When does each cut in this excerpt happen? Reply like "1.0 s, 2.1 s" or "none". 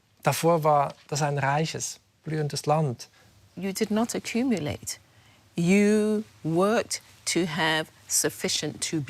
3.5 s